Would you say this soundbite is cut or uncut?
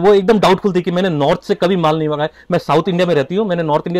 uncut